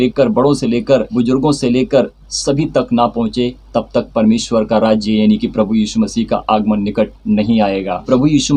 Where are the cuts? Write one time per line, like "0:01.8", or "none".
0:01.1